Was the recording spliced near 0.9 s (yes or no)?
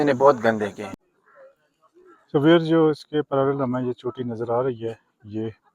yes